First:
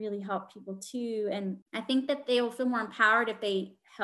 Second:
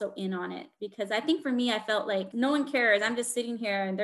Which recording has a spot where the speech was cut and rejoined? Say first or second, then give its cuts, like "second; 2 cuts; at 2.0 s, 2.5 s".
first; 1 cut; at 1.7 s